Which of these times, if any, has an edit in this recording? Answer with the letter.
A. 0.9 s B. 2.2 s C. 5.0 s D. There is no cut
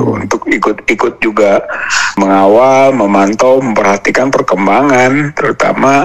B